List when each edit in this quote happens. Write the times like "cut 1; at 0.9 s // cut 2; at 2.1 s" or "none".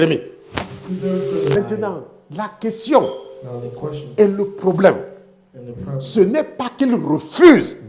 cut 1; at 1.6 s